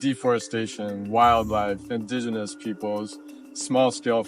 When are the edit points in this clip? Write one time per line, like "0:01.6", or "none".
0:00.9
0:01.8